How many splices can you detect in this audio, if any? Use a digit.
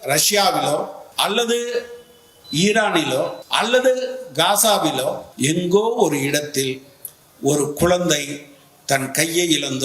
3